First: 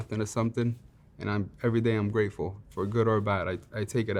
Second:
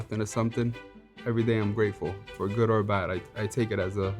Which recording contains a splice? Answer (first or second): second